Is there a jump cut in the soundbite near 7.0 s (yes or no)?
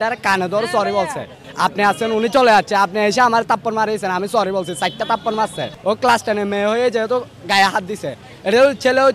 no